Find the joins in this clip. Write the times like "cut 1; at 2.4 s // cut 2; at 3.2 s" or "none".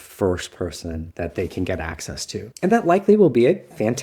cut 1; at 2.4 s